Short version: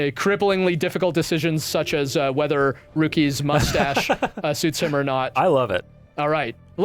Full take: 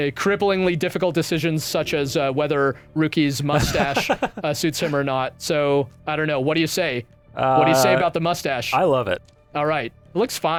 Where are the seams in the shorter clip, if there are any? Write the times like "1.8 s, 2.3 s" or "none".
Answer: 5.3 s